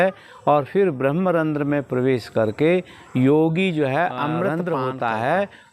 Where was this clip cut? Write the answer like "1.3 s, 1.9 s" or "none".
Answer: 4.5 s